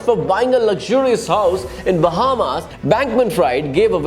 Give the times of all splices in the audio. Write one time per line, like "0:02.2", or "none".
0:02.7